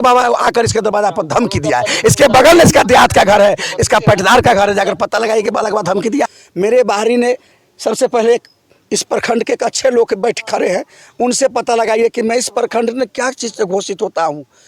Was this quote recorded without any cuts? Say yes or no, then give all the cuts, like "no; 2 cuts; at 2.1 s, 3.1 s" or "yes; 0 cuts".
no; 1 cut; at 6.3 s